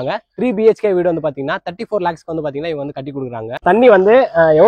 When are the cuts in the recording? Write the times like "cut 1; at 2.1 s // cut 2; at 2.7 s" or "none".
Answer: cut 1; at 3.6 s